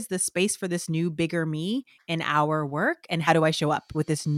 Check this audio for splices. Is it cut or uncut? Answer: cut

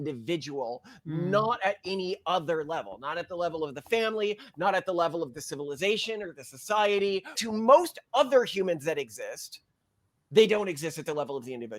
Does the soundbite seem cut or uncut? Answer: cut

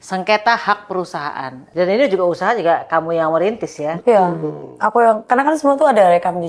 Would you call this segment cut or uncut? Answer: cut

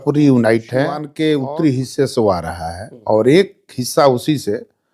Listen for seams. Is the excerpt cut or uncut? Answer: cut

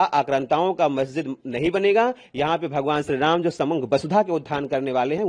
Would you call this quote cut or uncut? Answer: uncut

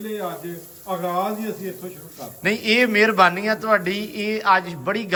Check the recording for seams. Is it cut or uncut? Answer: uncut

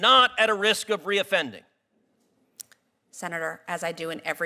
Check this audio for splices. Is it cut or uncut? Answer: uncut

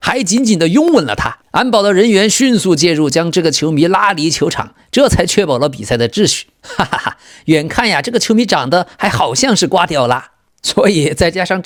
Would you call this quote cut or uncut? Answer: uncut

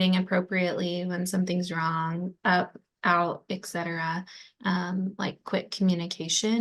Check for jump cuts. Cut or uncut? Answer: uncut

